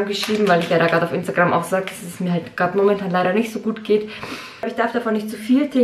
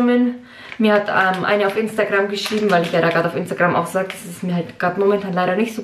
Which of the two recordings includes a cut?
first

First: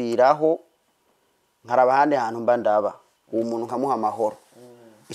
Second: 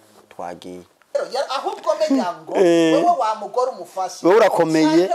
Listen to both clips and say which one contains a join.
second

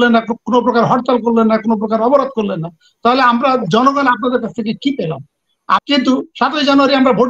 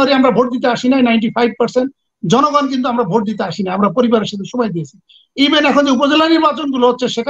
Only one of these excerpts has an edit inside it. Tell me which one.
first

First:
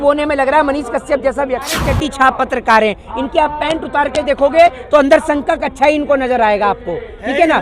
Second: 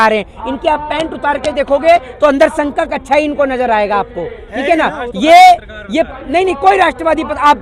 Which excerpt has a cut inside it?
first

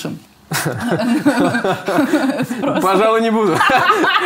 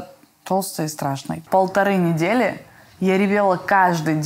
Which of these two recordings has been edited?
second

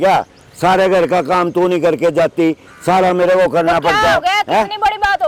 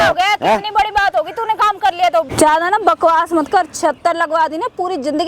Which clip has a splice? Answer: second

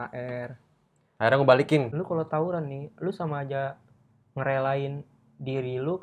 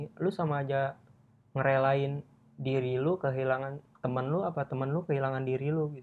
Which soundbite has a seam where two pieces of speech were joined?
first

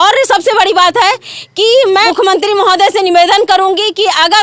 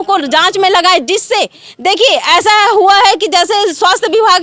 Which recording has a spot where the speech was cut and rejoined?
first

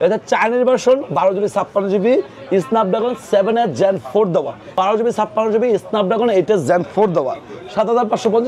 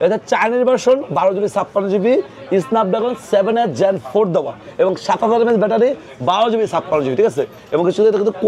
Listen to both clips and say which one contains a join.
first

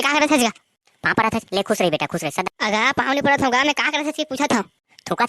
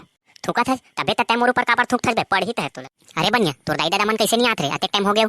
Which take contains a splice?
second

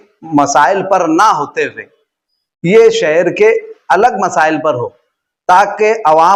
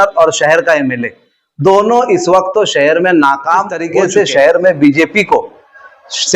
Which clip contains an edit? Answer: second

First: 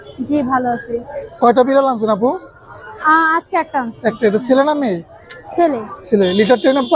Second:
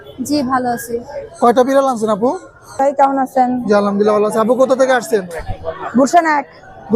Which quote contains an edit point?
second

